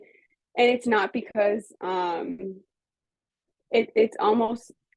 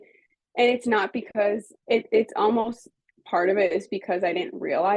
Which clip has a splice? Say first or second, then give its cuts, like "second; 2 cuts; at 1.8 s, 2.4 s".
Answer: second; 1 cut; at 1.7 s